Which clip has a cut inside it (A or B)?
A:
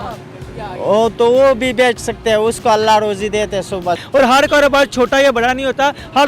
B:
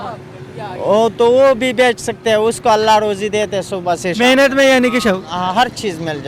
A